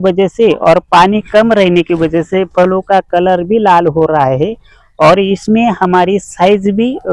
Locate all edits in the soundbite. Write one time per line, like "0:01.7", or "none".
none